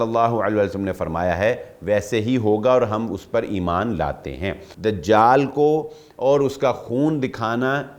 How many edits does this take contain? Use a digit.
1